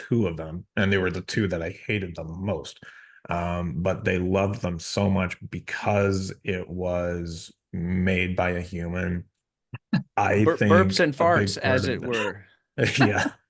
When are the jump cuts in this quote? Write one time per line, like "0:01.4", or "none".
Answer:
0:02.8